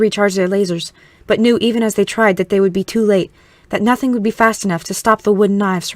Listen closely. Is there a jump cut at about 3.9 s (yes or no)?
no